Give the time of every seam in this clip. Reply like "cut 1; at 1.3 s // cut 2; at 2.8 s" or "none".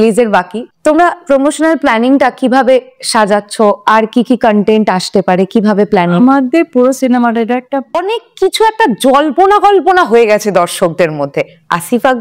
cut 1; at 8.0 s